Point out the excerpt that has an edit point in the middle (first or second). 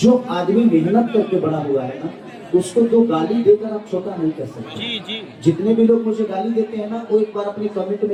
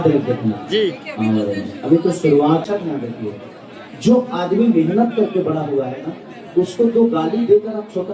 second